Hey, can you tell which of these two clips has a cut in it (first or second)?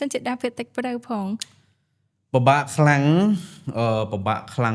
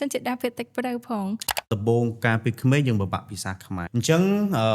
second